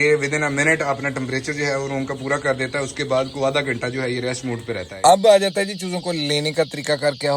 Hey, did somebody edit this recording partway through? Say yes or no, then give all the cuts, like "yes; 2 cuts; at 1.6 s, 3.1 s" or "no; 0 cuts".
yes; 1 cut; at 4.9 s